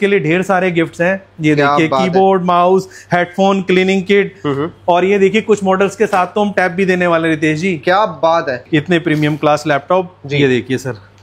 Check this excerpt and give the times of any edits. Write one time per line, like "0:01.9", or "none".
0:08.6